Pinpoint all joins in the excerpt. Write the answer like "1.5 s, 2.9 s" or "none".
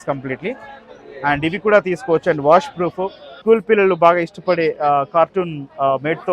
3.4 s